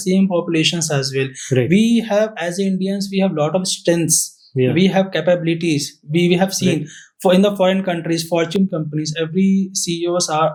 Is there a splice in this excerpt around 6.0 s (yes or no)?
no